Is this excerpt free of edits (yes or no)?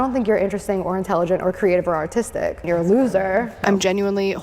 no